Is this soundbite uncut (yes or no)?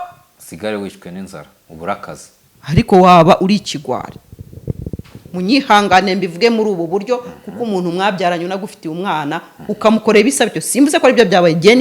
yes